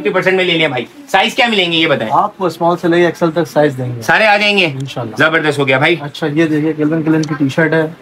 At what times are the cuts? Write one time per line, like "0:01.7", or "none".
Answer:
none

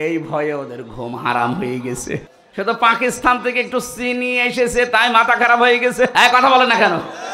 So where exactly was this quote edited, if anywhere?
0:02.4
0:06.1

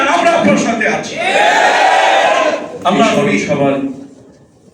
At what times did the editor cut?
0:03.4

